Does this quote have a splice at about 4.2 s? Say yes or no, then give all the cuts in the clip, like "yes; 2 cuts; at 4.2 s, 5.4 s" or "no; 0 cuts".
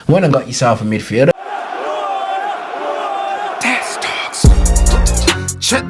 no; 1 cut; at 1.3 s